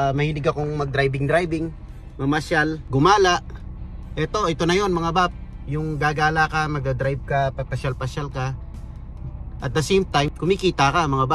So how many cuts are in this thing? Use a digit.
2